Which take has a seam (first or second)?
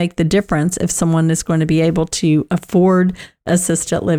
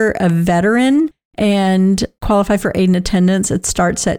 second